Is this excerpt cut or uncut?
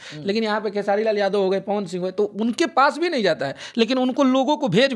uncut